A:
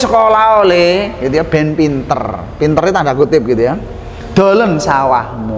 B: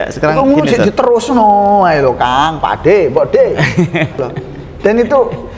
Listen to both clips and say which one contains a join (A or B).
B